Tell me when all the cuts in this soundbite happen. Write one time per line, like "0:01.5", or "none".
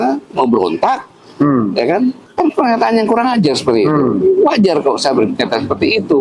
none

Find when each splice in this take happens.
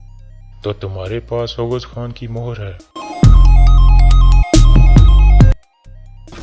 0:05.4

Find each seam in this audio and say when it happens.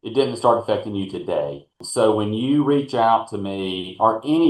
0:01.8

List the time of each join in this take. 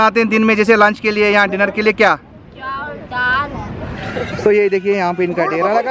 0:04.1

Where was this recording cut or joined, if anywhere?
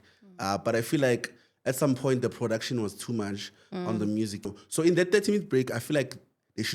0:04.5

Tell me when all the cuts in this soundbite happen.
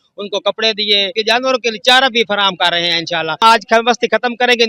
0:01.1
0:03.4

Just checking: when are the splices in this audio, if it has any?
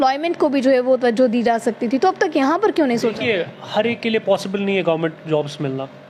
none

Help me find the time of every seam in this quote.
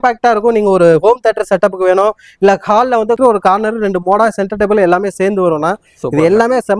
0:03.2

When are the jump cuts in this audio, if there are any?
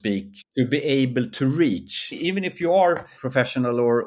0:02.1
0:03.1

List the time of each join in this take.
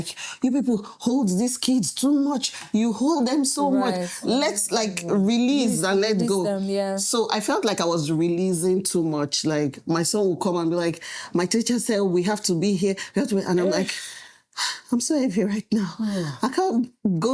none

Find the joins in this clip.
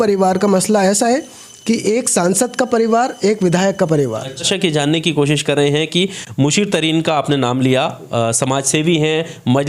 0:04.5

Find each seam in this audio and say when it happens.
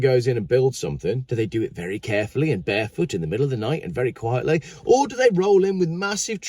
0:01.2

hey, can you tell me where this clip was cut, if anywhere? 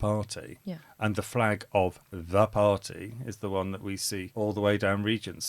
0:04.3

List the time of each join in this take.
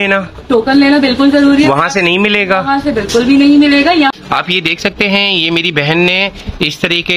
0:04.1

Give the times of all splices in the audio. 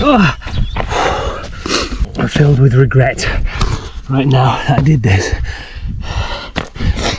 0:02.0

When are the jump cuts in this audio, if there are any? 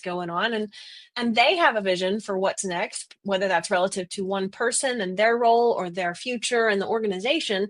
none

